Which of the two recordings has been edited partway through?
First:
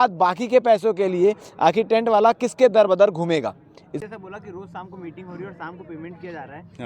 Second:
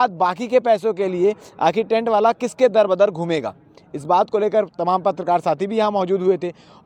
first; 1 cut; at 4.0 s

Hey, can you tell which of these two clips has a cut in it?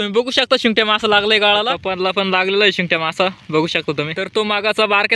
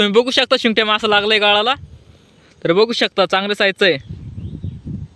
first; 2 cuts; at 1.9 s, 4.2 s

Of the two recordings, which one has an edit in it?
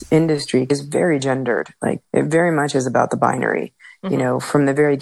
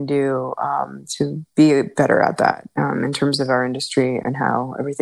first; 2 cuts; at 0.7 s, 2.0 s

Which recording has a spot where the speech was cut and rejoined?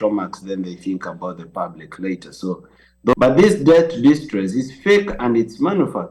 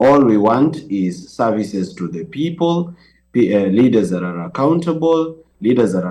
first; 1 cut; at 3.1 s

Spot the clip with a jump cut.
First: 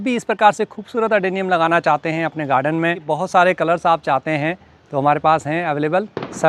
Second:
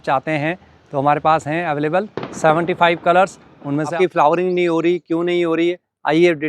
second; 1 cut; at 3.9 s

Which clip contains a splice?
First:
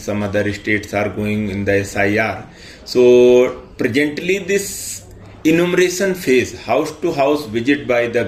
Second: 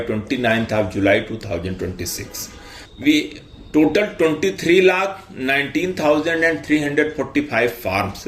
second; 1 cut; at 2.8 s

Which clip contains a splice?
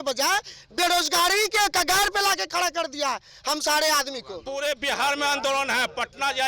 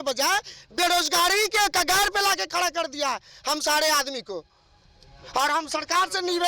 first; 1 cut; at 4.3 s

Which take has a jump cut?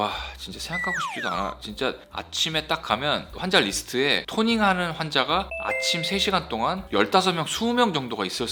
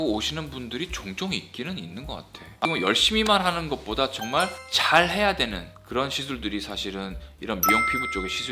second; 1 cut; at 2.6 s

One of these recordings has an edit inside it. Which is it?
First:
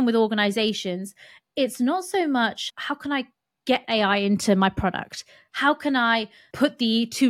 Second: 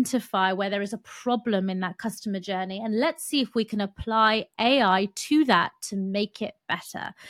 first; 2 cuts; at 2.7 s, 6.4 s

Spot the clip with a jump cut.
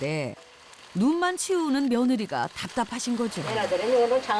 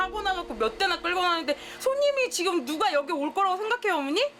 first; 1 cut; at 3.4 s

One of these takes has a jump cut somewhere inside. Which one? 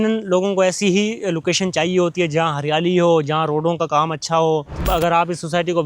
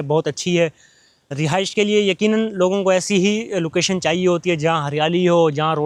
first; 1 cut; at 4.8 s

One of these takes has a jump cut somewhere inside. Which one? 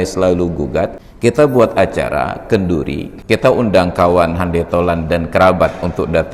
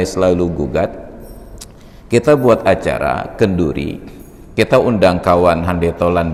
first; 2 cuts; at 1.0 s, 3.1 s

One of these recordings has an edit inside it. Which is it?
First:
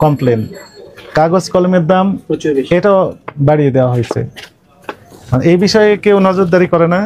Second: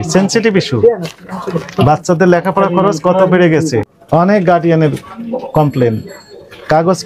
second; 1 cut; at 4.0 s

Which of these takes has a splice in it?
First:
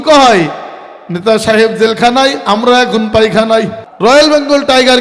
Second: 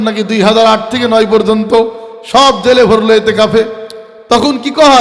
first; 1 cut; at 3.8 s

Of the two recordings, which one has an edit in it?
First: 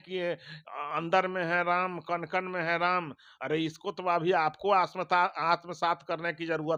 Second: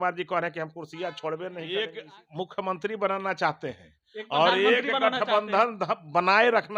second; 1 cut; at 1.9 s

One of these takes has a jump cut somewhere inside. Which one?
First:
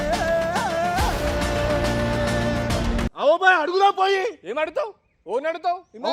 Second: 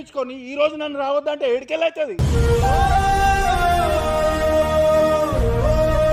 first; 1 cut; at 3.1 s

